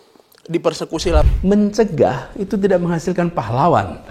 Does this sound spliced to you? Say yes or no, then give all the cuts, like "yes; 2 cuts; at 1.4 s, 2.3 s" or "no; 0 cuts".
yes; 1 cut; at 1.2 s